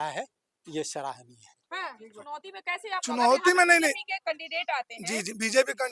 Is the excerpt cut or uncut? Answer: cut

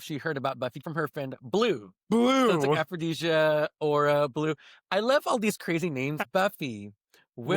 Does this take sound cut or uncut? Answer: cut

